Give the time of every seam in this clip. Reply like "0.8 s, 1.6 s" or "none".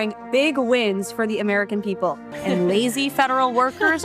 2.3 s